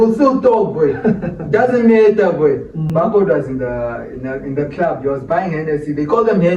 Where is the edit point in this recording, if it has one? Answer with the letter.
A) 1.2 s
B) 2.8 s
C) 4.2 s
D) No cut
B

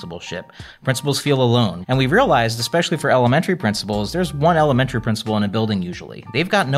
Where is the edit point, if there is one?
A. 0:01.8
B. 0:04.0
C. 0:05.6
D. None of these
A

